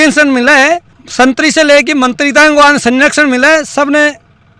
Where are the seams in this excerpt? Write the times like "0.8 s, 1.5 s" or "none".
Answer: none